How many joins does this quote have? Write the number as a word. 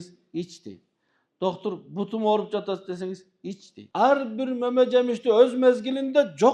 one